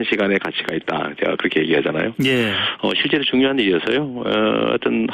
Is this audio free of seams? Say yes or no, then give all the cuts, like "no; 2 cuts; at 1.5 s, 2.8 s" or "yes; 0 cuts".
yes; 0 cuts